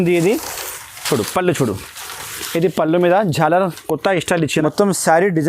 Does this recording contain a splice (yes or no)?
yes